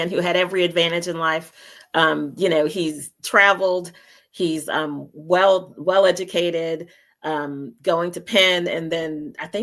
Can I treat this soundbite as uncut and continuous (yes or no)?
yes